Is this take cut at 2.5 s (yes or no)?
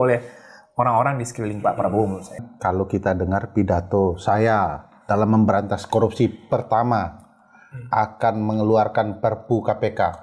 yes